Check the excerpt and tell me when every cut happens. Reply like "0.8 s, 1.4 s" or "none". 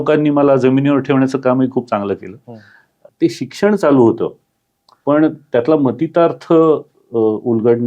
3.1 s